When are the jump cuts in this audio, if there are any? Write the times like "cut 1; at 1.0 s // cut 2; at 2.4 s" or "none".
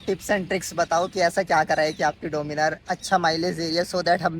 none